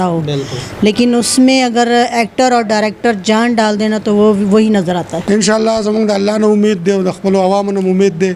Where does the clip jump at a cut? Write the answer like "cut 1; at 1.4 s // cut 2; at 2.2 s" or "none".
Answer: cut 1; at 5.2 s

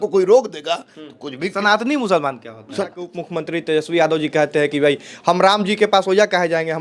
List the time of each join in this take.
cut 1; at 3.0 s

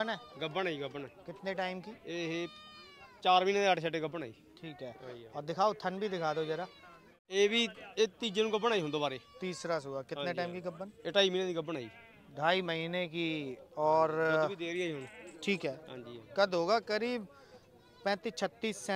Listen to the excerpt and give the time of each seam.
cut 1; at 7.1 s

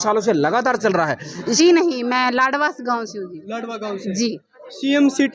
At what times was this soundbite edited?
cut 1; at 1.6 s

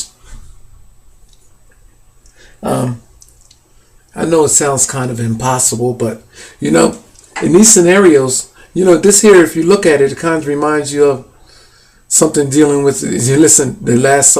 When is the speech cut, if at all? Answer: cut 1; at 5.0 s

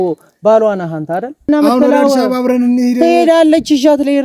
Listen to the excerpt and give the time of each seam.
cut 1; at 1.5 s

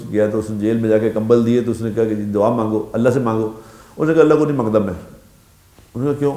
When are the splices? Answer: none

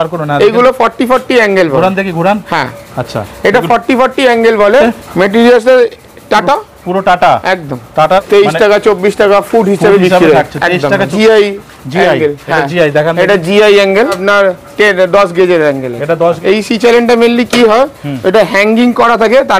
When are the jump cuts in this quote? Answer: cut 1; at 4.8 s // cut 2; at 8.2 s // cut 3; at 11.1 s // cut 4; at 14.2 s // cut 5; at 16.4 s

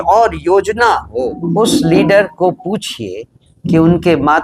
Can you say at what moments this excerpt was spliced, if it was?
cut 1; at 1.4 s

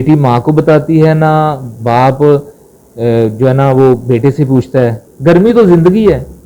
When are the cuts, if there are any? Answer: cut 1; at 5.0 s

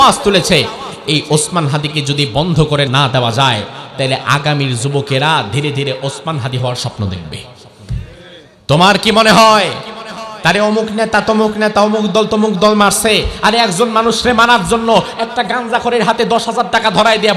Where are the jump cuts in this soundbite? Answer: cut 1; at 2.9 s // cut 2; at 8.5 s

